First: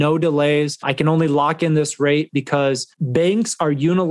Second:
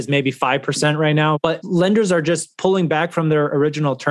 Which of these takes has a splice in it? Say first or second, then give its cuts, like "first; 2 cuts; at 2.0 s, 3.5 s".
second; 1 cut; at 1.4 s